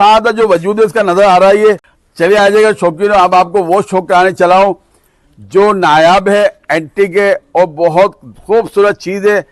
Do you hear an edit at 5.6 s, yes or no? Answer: no